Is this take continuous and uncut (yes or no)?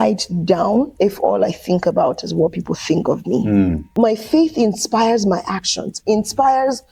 no